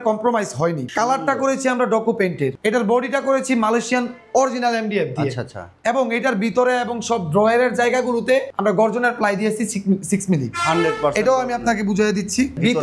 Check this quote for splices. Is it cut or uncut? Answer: uncut